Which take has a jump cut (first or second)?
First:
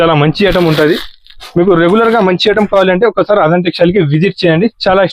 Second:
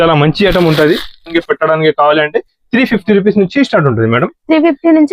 second